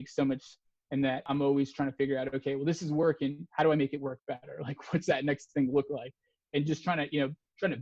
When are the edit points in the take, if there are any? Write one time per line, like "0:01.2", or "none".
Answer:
0:01.2